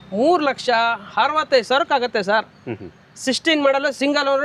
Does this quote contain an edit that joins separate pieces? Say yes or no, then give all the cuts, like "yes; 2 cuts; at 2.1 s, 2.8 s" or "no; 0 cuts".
no; 0 cuts